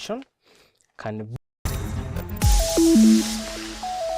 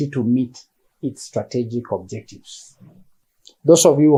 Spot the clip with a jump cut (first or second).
first